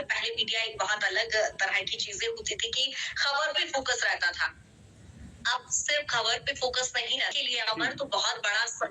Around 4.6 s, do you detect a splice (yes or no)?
no